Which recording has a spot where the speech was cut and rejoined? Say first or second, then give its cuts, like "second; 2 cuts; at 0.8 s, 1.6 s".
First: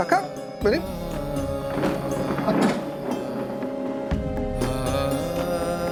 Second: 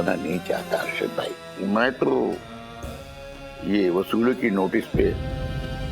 second; 2 cuts; at 1.4 s, 5.1 s